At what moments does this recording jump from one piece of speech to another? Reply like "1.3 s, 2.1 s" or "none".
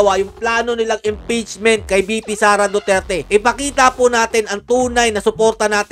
3.2 s